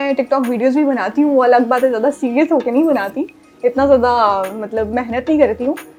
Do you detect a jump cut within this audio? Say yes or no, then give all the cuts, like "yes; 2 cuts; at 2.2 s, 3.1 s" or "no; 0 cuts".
no; 0 cuts